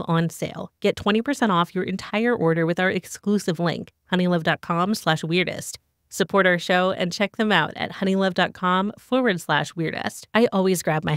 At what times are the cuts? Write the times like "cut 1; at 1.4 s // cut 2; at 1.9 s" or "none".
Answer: cut 1; at 10.1 s